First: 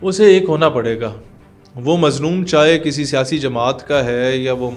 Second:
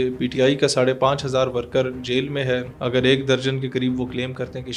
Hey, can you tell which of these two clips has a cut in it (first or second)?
second